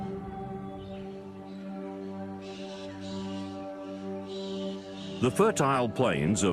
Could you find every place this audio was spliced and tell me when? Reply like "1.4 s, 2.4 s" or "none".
1.5 s